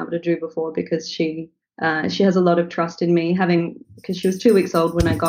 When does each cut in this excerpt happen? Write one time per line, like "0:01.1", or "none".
none